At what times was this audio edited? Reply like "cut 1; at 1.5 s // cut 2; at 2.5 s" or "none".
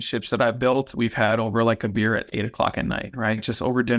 none